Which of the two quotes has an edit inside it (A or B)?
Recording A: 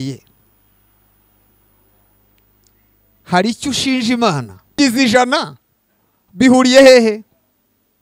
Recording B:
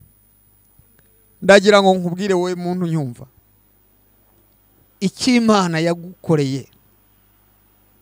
A